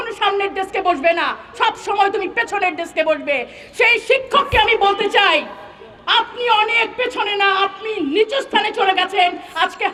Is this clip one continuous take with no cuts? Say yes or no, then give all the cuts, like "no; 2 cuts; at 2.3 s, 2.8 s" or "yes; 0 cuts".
yes; 0 cuts